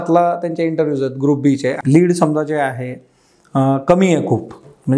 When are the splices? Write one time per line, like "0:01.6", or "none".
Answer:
0:01.8